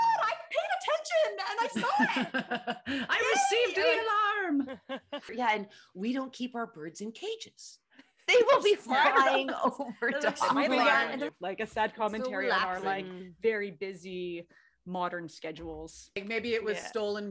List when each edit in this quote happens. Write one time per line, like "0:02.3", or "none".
0:05.3
0:11.3
0:16.2